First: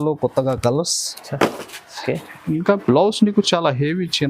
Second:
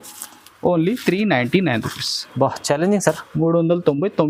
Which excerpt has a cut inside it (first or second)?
first